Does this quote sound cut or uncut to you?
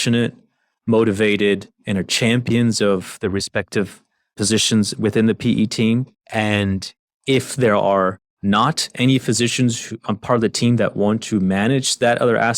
cut